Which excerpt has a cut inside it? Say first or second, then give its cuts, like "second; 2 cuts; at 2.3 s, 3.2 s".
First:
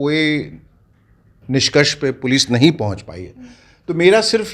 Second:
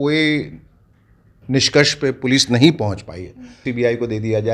second; 1 cut; at 3.6 s